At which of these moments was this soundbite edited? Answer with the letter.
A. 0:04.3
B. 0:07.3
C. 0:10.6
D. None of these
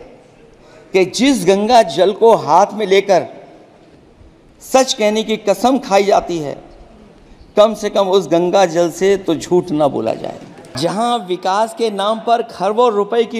C